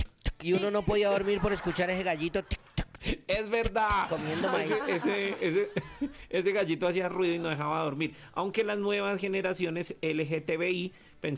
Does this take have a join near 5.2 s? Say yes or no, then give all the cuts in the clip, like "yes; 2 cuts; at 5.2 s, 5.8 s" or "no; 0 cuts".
yes; 1 cut; at 5.2 s